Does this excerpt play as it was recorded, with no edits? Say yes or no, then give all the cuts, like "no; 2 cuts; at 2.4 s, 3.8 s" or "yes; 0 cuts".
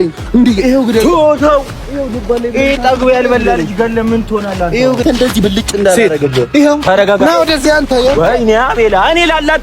no; 1 cut; at 5.0 s